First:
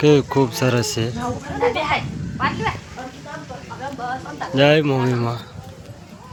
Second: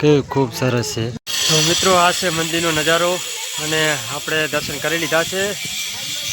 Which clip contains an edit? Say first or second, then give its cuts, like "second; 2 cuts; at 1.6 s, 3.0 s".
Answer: second; 1 cut; at 1.4 s